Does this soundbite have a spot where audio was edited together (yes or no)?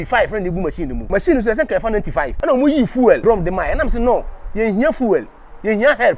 yes